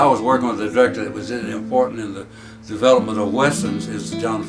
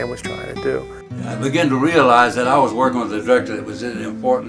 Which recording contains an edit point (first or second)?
second